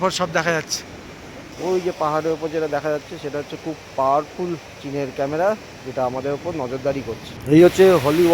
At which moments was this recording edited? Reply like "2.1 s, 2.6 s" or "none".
1.4 s, 7.3 s